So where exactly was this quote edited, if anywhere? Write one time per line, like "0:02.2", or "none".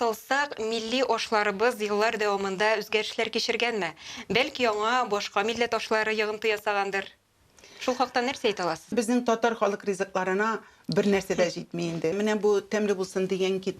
0:08.9
0:12.1